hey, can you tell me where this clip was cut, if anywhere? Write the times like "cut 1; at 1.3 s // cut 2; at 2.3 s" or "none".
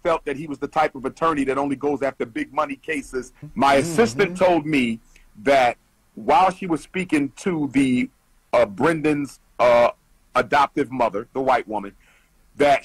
cut 1; at 3.4 s